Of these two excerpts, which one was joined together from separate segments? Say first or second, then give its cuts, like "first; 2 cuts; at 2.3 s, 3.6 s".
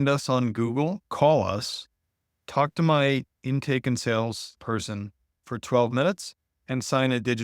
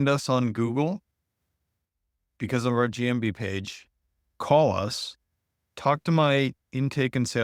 first; 2 cuts; at 1.0 s, 4.5 s